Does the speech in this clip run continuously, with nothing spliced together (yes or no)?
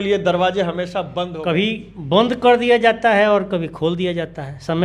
no